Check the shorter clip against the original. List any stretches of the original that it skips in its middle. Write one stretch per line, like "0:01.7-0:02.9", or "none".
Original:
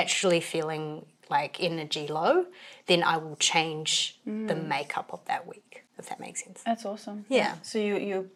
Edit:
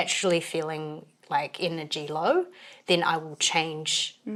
none